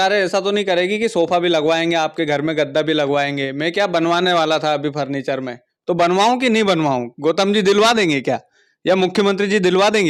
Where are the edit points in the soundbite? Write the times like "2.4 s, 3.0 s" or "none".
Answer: none